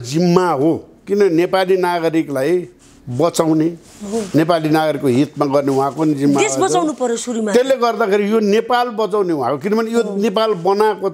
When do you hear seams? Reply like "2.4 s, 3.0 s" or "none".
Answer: none